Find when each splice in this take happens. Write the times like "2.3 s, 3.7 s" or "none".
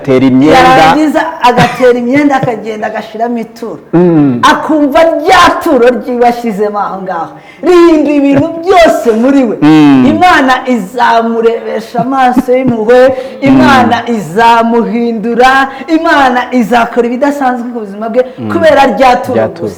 none